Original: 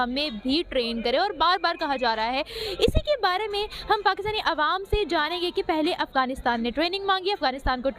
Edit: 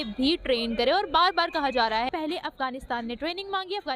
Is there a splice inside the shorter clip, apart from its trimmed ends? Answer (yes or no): yes